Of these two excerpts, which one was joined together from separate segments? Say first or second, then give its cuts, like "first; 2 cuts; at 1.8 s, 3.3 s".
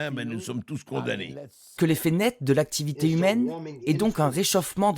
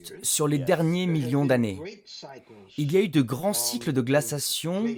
first; 1 cut; at 1.7 s